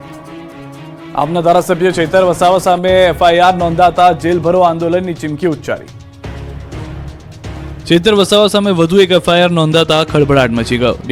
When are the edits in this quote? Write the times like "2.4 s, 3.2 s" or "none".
none